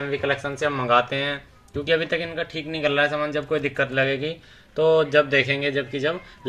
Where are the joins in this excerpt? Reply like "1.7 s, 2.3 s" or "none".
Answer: none